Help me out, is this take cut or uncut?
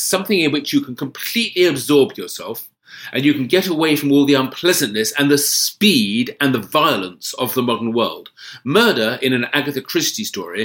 uncut